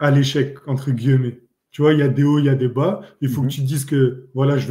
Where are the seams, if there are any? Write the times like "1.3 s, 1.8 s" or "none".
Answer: none